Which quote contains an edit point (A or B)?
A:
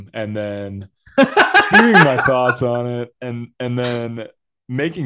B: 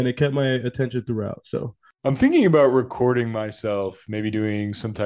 B